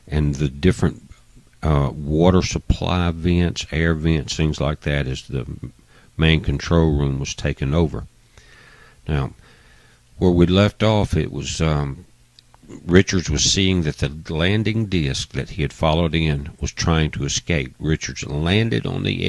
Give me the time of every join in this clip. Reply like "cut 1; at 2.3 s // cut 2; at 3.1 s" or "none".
cut 1; at 16.4 s